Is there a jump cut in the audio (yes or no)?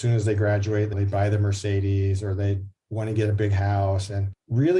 yes